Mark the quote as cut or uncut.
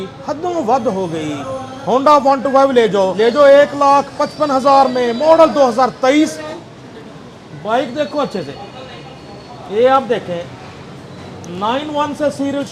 cut